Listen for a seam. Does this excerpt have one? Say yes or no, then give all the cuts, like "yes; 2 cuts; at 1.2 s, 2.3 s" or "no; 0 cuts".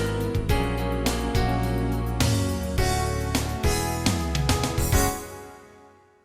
yes; 1 cut; at 2.8 s